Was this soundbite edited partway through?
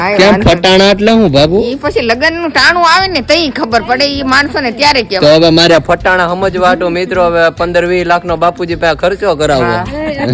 no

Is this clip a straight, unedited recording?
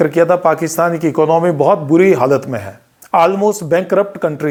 yes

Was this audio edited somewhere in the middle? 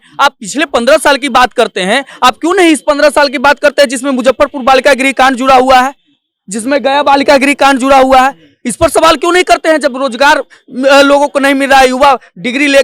no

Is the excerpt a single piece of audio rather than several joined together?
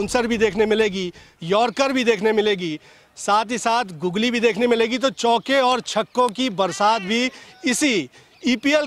yes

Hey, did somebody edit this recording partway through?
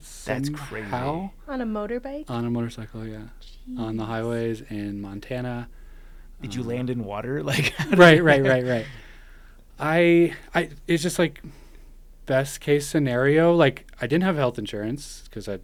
no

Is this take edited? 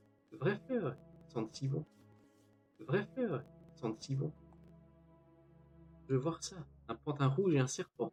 no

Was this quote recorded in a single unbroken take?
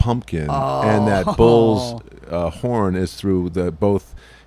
yes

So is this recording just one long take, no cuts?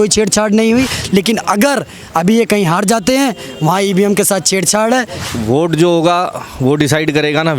no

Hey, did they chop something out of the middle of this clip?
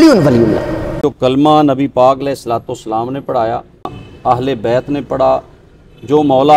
yes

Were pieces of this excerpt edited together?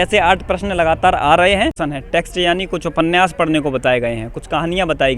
yes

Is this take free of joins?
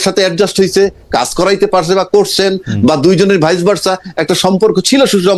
yes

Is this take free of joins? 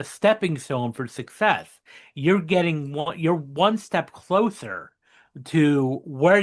yes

